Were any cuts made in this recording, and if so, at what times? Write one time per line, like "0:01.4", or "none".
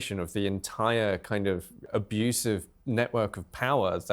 0:01.8

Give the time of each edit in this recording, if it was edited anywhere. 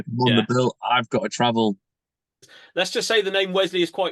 0:02.5

